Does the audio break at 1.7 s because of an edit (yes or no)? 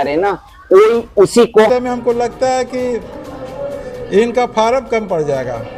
yes